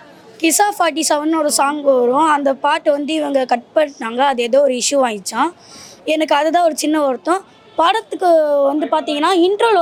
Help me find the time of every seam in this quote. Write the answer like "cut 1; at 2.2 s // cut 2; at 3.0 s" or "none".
none

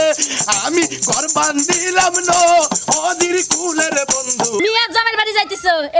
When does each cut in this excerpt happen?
cut 1; at 4.6 s

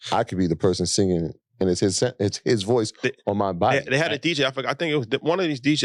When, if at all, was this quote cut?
none

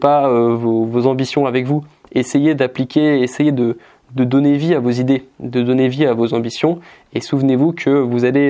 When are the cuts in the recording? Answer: none

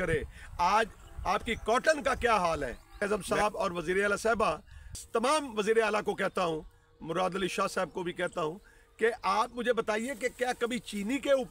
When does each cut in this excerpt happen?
cut 1; at 3.0 s // cut 2; at 5.0 s

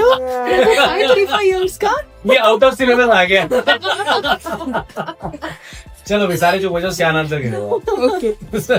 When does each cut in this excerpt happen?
none

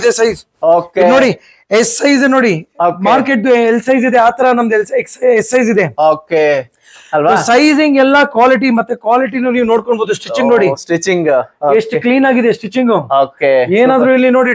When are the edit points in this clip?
none

